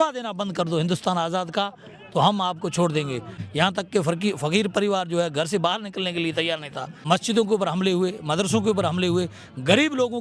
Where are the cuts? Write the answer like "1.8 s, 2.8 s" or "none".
3.4 s, 6.9 s